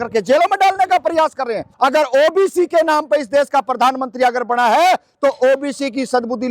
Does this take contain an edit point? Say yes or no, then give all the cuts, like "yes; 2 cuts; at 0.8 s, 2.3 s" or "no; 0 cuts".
yes; 1 cut; at 1.6 s